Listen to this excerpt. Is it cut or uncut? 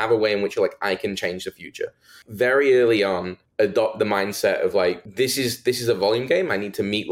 cut